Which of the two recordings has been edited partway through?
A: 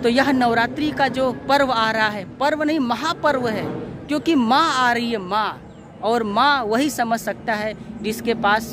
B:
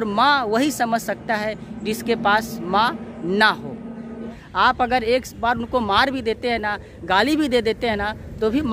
B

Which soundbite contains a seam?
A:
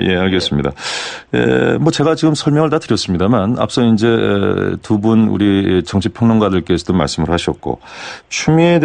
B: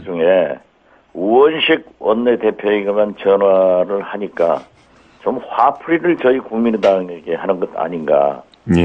B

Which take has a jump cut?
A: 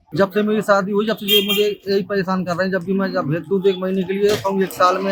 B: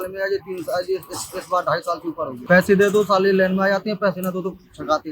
B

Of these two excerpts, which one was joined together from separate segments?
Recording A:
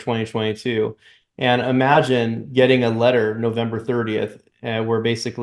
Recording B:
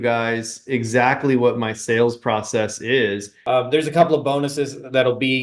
B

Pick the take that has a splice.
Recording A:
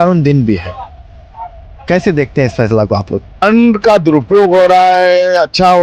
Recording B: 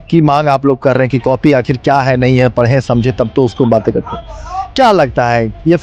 A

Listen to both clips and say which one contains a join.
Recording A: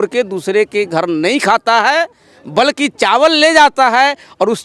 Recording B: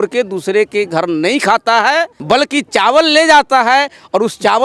B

